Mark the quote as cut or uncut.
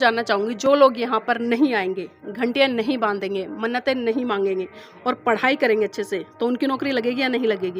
uncut